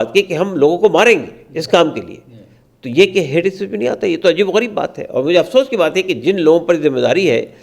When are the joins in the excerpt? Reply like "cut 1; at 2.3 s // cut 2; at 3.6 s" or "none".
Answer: none